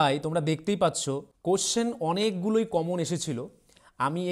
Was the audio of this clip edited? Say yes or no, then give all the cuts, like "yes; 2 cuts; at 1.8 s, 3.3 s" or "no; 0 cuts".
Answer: yes; 1 cut; at 1.3 s